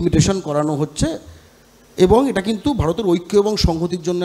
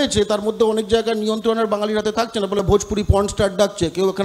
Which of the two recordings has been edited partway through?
second; 1 cut; at 2.6 s

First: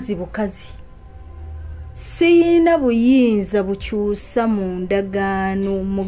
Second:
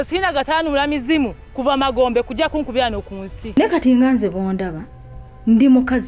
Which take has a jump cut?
second; 1 cut; at 3.6 s

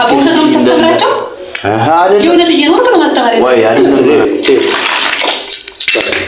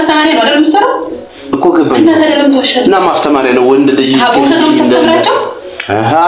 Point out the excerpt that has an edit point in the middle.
first; 1 cut; at 3.8 s

